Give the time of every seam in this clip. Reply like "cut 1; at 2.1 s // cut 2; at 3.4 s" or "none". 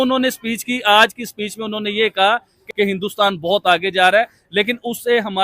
cut 1; at 2.6 s